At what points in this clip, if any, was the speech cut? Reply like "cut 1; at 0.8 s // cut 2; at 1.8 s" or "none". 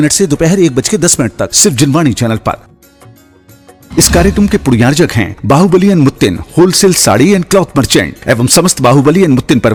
none